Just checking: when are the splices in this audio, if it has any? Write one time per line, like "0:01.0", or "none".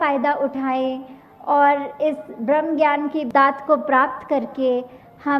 0:03.3